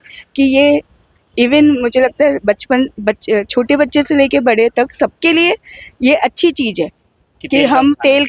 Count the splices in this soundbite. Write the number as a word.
zero